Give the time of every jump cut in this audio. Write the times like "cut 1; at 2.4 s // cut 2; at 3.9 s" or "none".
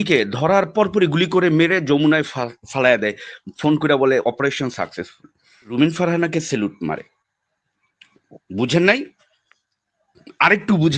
cut 1; at 5.7 s